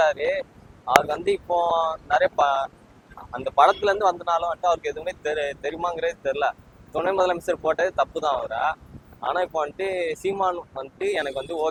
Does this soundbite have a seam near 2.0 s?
no; 0 cuts

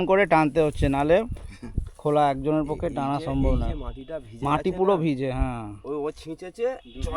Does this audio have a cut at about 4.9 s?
no; 0 cuts

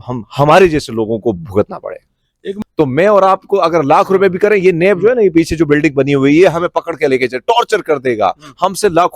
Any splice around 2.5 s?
yes; 1 cut; at 2.5 s

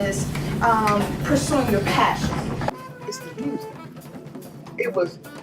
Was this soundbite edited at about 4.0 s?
no; 1 cut; at 2.8 s

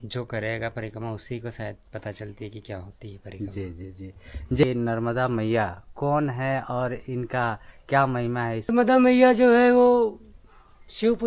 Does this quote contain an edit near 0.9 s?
no; 2 cuts; at 4.6 s, 8.7 s

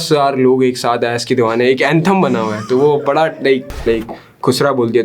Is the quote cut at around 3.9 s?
yes; 1 cut; at 3.9 s

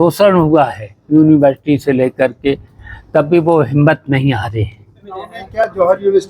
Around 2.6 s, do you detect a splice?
no; 1 cut; at 5.4 s

